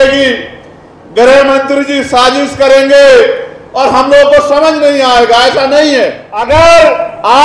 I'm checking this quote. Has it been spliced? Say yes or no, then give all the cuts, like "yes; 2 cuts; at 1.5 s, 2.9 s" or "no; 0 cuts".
yes; 1 cut; at 6.3 s